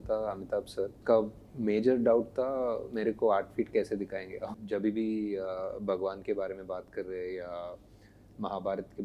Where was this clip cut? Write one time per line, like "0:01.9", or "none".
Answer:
0:01.0
0:04.5